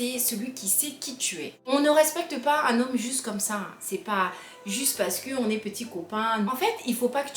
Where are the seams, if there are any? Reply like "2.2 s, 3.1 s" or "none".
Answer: 1.7 s, 6.5 s